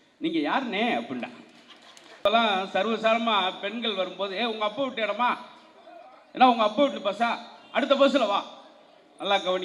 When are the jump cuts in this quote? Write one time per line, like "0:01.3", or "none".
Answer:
0:02.3